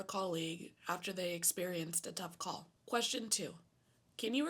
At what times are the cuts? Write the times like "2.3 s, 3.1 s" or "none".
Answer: 2.7 s